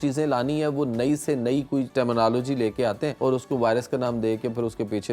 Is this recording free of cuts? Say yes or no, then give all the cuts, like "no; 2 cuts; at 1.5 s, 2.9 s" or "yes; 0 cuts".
no; 2 cuts; at 1.9 s, 3.1 s